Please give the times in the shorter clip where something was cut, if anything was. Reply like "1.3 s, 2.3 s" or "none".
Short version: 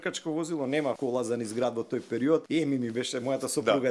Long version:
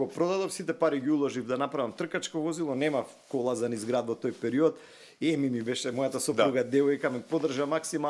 1.0 s, 2.5 s

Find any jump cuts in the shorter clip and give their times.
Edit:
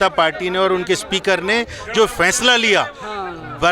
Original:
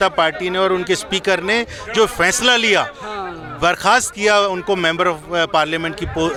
none

